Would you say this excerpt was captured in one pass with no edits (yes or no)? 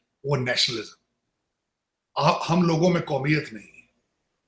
yes